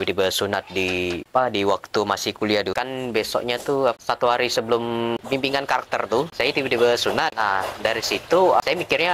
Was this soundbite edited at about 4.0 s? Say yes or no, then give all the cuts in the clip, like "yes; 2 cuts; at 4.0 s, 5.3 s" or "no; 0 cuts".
no; 5 cuts; at 1.2 s, 2.7 s, 5.2 s, 6.3 s, 7.3 s